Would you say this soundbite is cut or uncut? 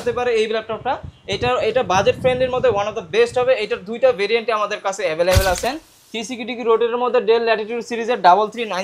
cut